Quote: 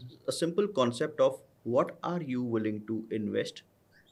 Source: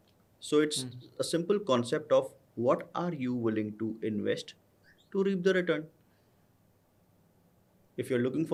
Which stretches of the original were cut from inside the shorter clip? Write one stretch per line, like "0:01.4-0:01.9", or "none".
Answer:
none